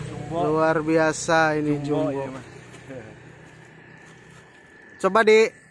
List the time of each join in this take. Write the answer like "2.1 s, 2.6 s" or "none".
none